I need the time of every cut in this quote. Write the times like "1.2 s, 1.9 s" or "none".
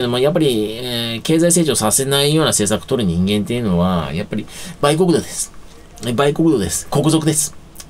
none